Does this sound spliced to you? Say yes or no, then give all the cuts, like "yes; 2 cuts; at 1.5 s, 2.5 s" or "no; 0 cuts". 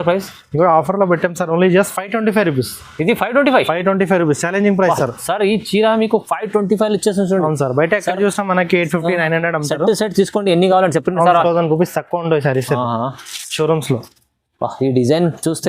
yes; 1 cut; at 11.4 s